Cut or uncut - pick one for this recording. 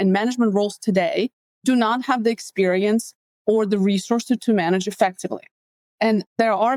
uncut